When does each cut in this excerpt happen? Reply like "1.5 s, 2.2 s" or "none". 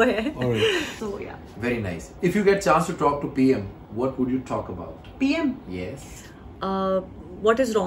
1.0 s